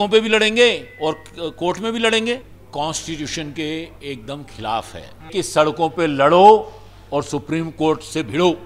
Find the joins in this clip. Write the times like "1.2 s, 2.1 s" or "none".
2.6 s, 5.3 s